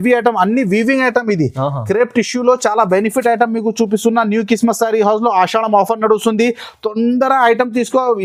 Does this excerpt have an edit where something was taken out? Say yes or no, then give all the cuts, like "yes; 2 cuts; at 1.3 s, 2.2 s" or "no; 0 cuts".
no; 0 cuts